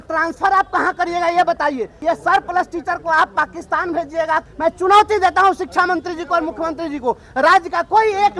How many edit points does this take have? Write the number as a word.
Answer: two